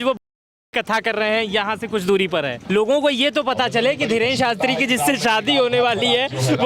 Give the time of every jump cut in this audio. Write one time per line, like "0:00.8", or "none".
0:02.6